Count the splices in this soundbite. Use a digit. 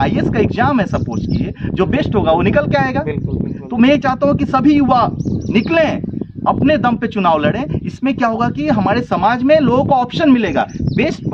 0